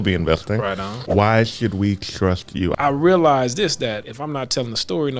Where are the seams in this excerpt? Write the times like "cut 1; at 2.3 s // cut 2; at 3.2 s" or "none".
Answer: cut 1; at 0.9 s // cut 2; at 2.7 s // cut 3; at 4.1 s